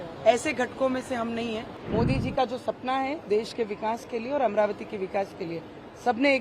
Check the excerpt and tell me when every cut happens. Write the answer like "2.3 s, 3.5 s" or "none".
1.7 s